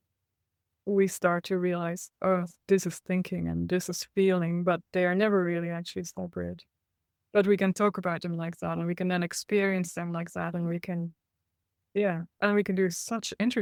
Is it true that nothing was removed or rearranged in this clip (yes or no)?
yes